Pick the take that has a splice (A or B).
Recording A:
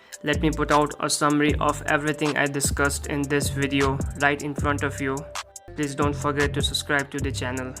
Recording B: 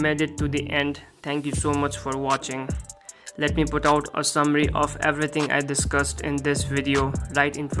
A